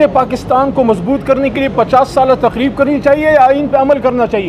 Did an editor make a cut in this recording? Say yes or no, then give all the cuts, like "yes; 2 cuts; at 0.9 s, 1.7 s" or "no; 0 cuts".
no; 0 cuts